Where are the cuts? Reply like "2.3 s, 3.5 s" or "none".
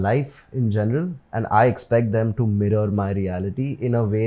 none